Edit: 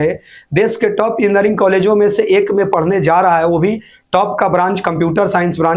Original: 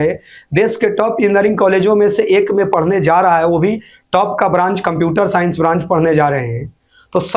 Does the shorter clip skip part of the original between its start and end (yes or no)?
no